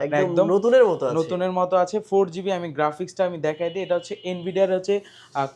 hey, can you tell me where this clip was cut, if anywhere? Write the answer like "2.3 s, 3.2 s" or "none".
none